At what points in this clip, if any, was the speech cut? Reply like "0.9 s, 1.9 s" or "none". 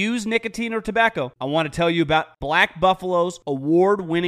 1.4 s, 2.3 s, 3.4 s